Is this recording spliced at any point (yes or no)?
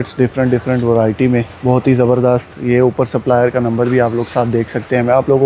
yes